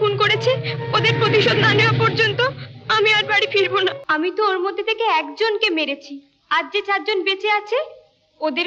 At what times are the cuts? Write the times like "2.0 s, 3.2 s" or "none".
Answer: 4.0 s